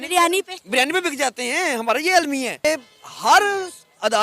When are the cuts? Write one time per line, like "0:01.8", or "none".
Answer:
0:02.6

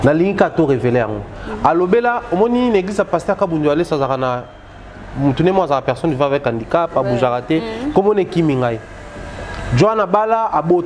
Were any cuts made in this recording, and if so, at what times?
none

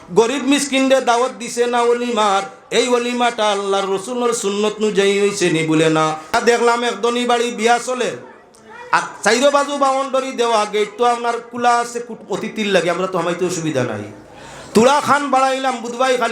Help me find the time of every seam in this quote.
0:06.4

